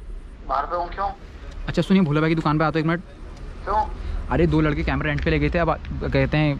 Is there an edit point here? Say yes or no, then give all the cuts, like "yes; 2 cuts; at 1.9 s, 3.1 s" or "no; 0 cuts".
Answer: no; 0 cuts